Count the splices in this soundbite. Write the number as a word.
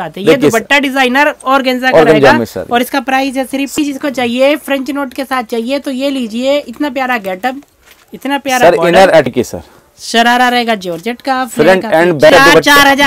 three